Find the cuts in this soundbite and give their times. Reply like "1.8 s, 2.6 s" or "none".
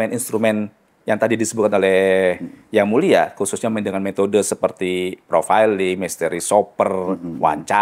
none